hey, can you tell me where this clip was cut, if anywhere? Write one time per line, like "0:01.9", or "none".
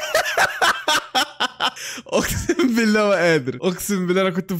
0:03.5